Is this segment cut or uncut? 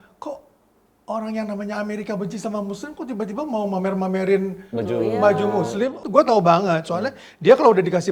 cut